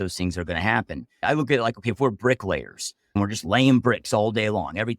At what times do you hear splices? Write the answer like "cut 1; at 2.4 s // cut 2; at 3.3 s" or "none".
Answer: cut 1; at 1.1 s // cut 2; at 3.2 s